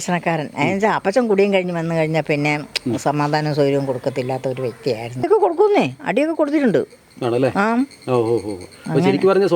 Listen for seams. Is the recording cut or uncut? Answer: cut